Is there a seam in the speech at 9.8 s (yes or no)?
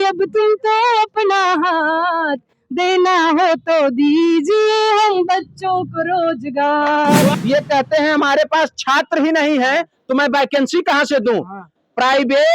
no